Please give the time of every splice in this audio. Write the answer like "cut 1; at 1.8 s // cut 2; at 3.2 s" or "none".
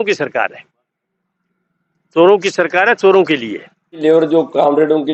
cut 1; at 4.0 s